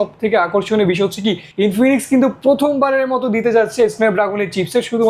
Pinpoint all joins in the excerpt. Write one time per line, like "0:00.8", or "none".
0:01.5